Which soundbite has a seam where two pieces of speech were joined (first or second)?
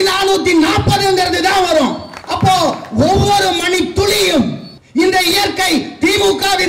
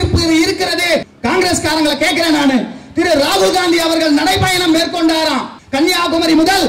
second